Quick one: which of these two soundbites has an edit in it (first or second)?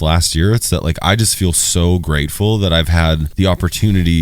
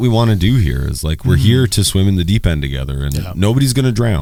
first